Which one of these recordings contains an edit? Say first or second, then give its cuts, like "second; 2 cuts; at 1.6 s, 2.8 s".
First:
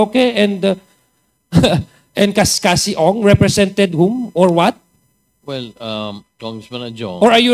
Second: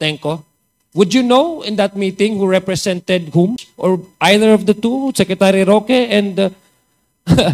second; 1 cut; at 3.7 s